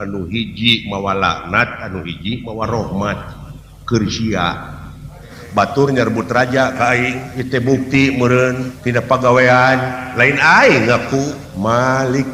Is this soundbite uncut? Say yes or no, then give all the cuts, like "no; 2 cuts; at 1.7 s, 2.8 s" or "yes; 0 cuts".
no; 4 cuts; at 5.3 s, 7.3 s, 8.7 s, 11.4 s